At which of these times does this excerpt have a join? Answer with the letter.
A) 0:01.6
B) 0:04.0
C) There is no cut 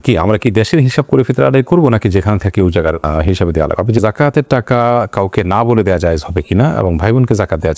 B